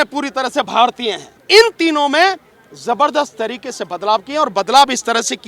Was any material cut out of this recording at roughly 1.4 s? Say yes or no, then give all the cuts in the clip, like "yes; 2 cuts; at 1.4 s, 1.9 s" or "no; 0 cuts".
yes; 1 cut; at 1.4 s